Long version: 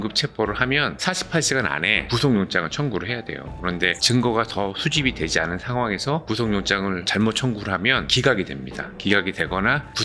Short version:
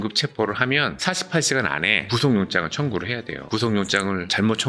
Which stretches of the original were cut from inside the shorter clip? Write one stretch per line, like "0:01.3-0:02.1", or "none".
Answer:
0:03.5-0:06.2